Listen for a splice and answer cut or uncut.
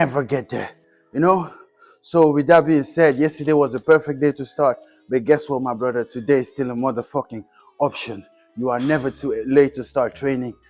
uncut